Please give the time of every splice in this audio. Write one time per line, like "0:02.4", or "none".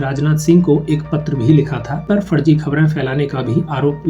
0:02.1